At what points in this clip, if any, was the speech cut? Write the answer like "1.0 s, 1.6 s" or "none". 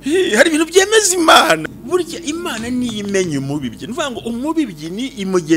1.6 s